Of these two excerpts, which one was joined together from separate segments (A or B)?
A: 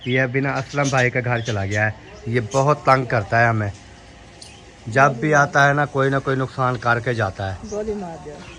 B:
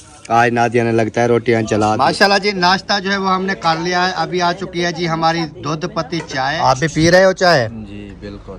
B